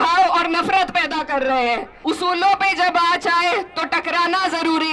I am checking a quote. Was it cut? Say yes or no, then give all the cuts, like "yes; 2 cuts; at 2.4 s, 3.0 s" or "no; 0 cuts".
yes; 1 cut; at 1.9 s